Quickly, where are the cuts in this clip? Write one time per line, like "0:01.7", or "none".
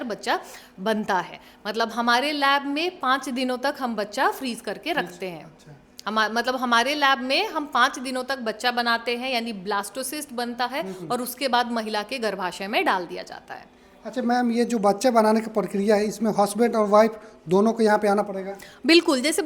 none